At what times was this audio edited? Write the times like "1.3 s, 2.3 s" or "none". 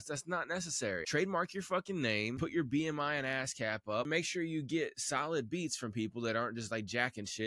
1.0 s, 2.3 s, 4.1 s